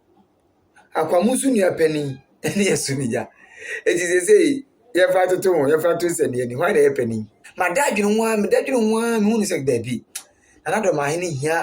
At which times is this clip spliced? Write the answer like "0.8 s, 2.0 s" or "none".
7.4 s